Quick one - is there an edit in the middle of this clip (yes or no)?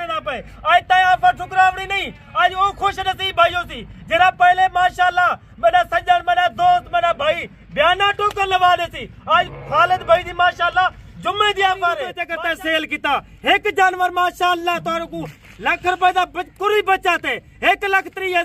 yes